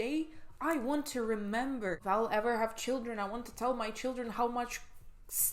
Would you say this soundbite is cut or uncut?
cut